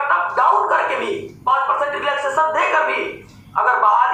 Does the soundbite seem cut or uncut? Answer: uncut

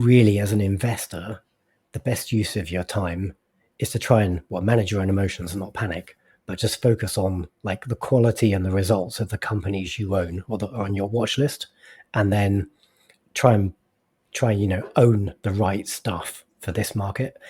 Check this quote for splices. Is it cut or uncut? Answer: uncut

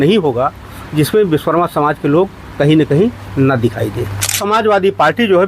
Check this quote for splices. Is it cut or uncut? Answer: cut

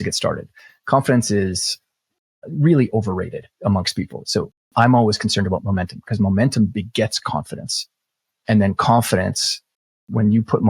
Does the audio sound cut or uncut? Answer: cut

